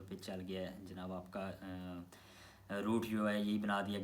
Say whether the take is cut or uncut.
uncut